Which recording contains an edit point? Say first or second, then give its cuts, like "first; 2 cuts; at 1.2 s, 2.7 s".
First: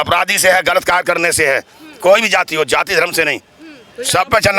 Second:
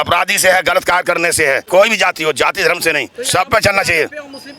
second; 2 cuts; at 1.6 s, 3.1 s